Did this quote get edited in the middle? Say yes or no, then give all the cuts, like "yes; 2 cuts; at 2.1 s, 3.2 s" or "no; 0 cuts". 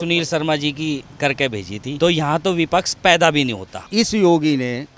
yes; 1 cut; at 3.9 s